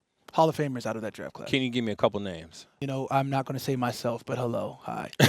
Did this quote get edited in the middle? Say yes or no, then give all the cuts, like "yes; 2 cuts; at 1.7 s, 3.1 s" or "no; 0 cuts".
yes; 1 cut; at 2.7 s